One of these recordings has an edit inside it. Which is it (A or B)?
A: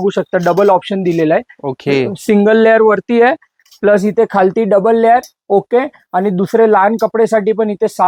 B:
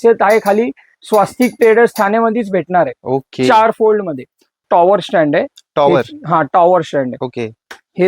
B